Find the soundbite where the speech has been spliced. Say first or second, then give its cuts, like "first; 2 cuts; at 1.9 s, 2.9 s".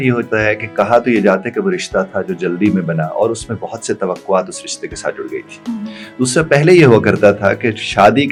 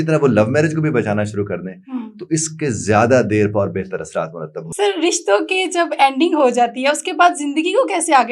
second; 1 cut; at 4.6 s